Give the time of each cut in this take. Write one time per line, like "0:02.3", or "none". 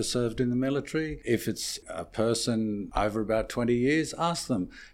0:01.8
0:02.9